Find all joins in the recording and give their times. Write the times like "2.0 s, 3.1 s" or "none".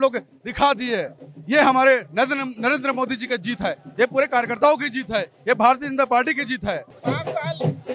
none